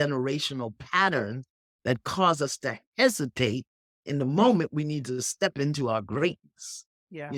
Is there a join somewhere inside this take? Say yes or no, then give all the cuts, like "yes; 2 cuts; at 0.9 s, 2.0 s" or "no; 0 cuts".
no; 0 cuts